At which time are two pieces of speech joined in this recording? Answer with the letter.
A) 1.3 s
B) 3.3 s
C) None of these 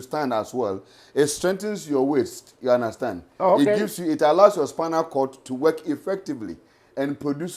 C